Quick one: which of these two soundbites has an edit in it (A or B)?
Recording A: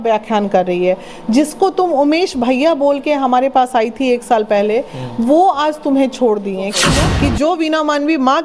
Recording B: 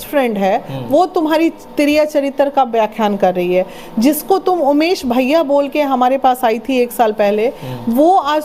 A